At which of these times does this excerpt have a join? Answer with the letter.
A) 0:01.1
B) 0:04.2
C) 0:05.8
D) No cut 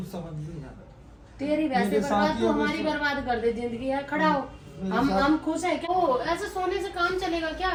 D